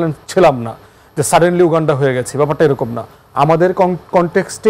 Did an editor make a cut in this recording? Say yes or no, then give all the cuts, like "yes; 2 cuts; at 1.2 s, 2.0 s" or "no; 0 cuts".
no; 0 cuts